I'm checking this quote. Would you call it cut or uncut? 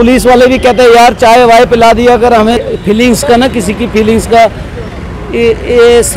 cut